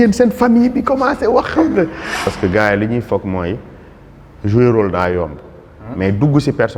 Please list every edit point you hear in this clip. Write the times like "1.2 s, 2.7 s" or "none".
2.2 s